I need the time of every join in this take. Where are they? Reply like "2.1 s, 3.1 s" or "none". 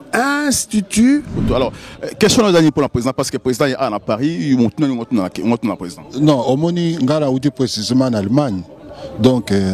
1.4 s